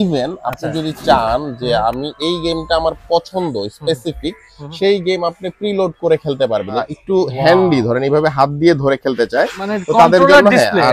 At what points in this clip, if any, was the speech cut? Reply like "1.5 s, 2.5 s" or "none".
6.9 s

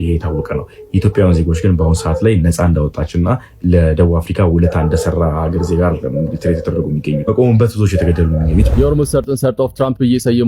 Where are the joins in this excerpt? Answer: 8.7 s

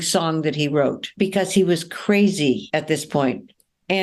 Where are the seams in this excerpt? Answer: 1.1 s, 2.6 s

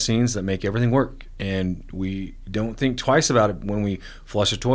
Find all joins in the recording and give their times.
none

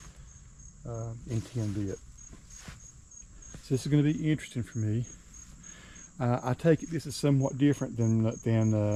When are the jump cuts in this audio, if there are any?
none

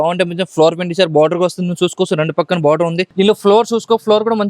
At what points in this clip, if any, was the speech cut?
3.1 s

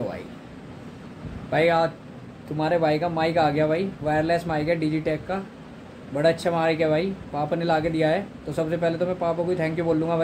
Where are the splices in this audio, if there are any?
none

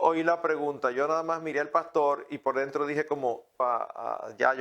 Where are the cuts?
3.6 s

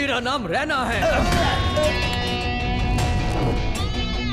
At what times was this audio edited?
2.0 s

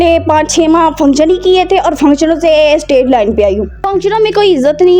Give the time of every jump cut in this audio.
3.8 s

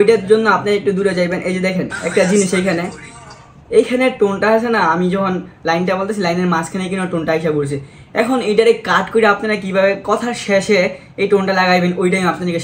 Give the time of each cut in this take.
none

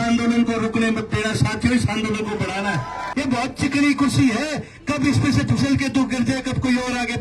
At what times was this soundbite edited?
3.0 s

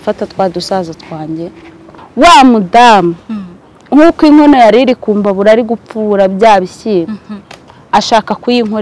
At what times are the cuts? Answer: 2.0 s

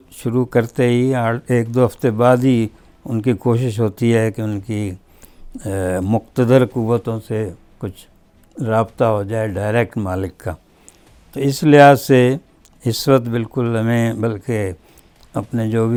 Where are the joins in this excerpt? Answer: none

